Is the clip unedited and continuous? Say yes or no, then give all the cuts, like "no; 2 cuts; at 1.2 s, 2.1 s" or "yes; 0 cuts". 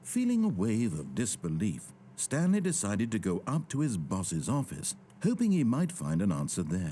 yes; 0 cuts